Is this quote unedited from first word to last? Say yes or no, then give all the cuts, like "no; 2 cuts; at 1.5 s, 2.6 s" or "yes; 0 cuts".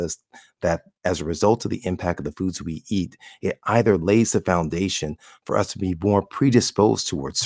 yes; 0 cuts